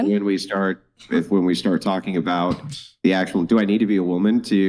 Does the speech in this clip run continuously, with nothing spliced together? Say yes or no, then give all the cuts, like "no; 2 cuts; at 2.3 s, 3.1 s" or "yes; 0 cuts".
yes; 0 cuts